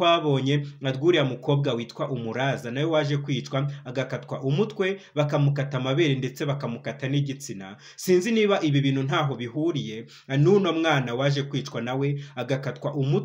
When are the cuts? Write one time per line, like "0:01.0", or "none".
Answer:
none